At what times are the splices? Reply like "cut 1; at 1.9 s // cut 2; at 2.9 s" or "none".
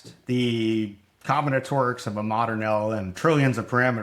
none